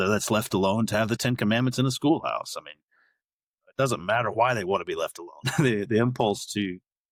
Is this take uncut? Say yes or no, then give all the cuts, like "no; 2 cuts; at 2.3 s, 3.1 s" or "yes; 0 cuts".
yes; 0 cuts